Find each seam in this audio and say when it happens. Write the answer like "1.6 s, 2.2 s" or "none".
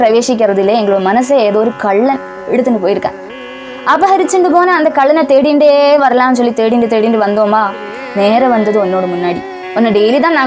3.4 s, 9.6 s